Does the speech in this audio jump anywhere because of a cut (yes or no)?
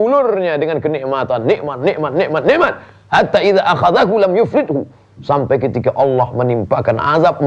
no